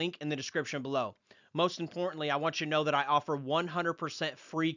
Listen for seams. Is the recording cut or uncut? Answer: uncut